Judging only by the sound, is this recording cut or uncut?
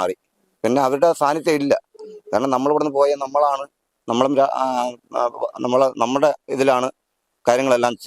uncut